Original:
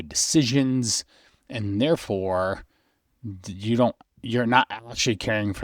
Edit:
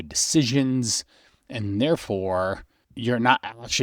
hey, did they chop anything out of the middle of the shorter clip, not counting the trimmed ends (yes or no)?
yes